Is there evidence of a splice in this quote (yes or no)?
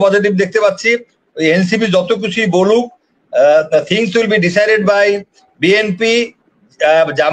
no